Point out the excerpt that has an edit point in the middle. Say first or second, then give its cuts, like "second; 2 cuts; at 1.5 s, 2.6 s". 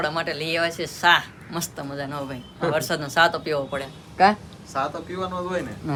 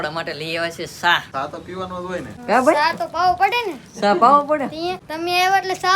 second; 3 cuts; at 1.3 s, 2.4 s, 5.1 s